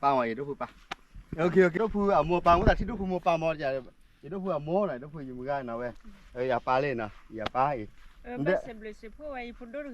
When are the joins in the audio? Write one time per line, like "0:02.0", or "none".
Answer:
0:01.7